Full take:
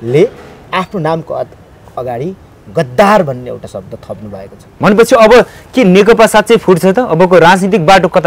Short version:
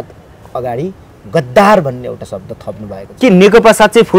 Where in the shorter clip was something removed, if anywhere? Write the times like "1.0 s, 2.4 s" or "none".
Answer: 3.1 s